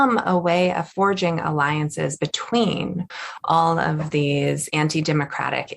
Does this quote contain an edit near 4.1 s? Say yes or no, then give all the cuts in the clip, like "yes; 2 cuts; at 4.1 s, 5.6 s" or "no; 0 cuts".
no; 0 cuts